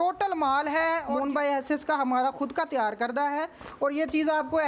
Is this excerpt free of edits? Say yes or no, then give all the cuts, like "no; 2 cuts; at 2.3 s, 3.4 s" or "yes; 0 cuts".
no; 1 cut; at 1.2 s